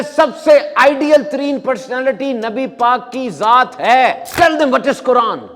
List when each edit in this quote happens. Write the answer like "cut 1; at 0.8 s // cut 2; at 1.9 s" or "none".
cut 1; at 4.2 s